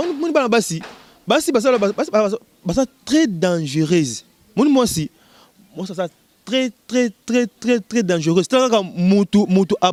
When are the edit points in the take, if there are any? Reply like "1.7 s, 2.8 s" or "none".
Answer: none